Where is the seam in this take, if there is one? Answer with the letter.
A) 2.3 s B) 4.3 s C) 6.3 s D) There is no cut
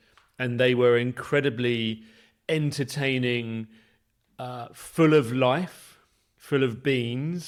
D